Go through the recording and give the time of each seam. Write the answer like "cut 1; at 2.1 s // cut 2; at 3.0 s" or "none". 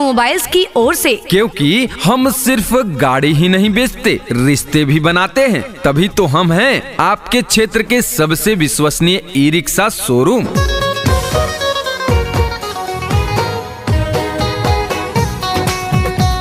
none